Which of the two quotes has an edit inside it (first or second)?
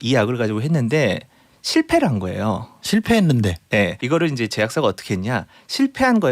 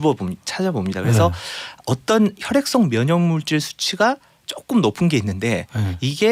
first